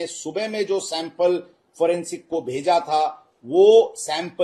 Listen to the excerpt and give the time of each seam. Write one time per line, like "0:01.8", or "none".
none